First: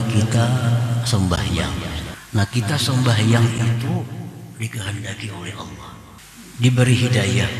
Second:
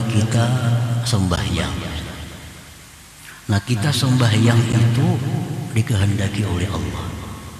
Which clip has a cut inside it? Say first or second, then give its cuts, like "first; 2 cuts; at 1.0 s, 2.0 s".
first; 2 cuts; at 2.1 s, 6.2 s